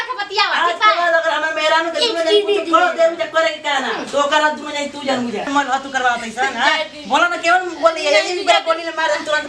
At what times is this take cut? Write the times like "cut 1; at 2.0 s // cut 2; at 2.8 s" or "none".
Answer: cut 1; at 5.5 s